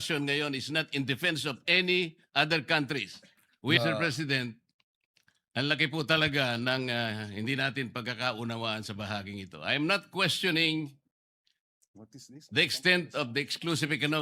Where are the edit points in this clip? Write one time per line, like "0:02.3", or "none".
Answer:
0:03.8